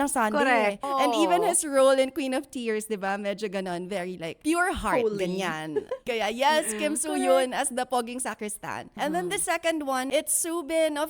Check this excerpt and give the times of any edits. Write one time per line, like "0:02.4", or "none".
0:00.8
0:04.4
0:06.0
0:07.9
0:08.9
0:10.1